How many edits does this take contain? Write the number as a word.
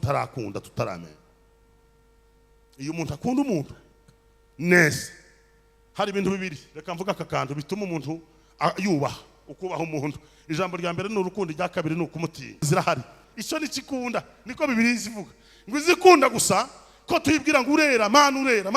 one